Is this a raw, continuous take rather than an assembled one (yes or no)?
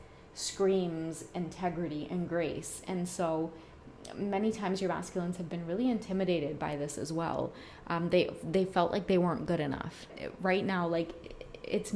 no